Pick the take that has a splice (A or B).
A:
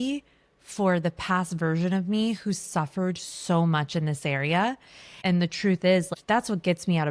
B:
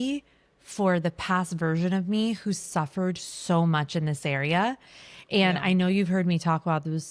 A